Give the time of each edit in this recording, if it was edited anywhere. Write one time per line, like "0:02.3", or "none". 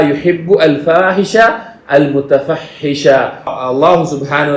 0:03.5